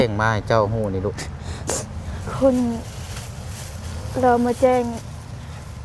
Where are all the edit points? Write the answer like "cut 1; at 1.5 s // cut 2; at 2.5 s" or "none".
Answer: none